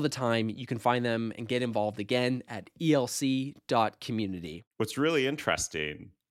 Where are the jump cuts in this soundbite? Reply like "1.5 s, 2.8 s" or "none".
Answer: 4.6 s